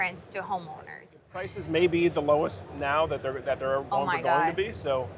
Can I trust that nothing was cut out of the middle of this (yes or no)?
no